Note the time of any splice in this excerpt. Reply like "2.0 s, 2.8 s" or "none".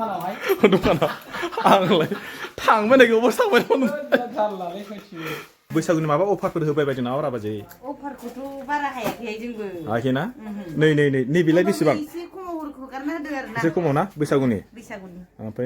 5.6 s